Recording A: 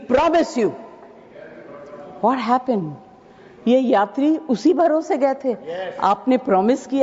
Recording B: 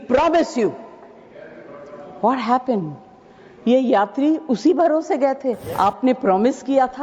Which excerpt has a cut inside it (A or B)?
B